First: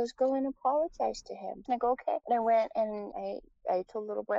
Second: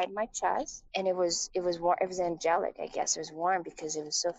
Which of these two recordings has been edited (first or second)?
first